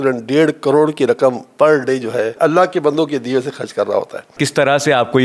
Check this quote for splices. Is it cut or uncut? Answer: cut